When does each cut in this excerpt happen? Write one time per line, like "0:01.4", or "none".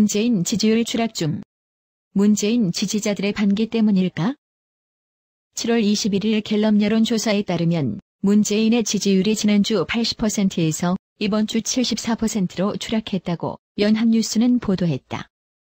0:12.7